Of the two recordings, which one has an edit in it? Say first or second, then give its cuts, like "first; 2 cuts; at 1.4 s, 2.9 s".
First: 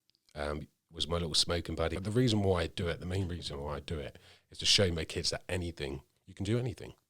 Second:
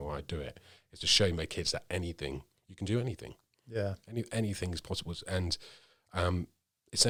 first; 1 cut; at 1.9 s